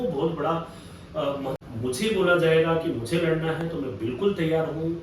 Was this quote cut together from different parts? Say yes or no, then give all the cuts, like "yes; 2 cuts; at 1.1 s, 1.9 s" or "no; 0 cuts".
yes; 1 cut; at 1.6 s